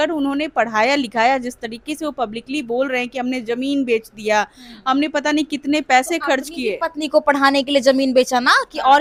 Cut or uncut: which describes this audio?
uncut